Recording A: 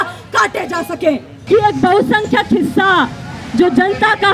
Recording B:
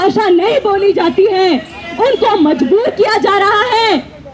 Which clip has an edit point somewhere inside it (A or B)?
A